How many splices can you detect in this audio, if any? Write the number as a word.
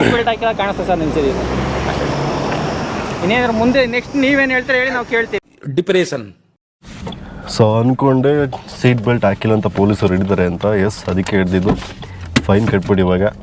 zero